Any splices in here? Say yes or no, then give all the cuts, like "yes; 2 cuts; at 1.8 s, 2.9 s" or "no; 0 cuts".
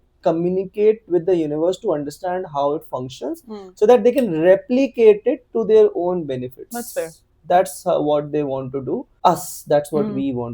yes; 1 cut; at 9.1 s